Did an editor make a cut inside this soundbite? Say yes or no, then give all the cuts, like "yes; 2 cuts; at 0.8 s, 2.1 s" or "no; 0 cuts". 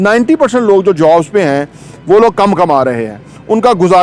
no; 0 cuts